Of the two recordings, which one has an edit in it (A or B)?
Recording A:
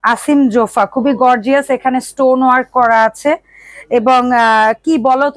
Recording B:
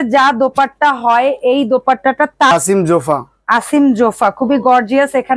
B